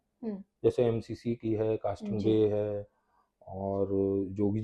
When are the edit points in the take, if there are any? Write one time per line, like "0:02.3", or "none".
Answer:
none